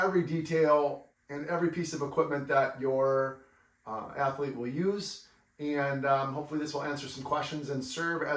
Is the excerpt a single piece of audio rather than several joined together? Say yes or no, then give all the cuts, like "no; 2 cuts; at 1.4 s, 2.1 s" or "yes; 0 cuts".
no; 1 cut; at 1.1 s